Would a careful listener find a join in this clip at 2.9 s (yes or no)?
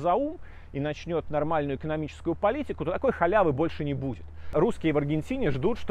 no